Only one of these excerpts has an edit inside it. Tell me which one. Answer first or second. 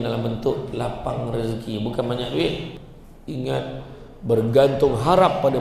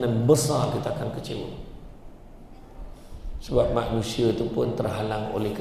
first